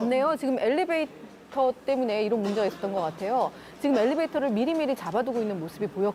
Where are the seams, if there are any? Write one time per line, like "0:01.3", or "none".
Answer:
none